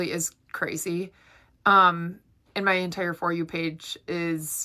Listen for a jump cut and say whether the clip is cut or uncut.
uncut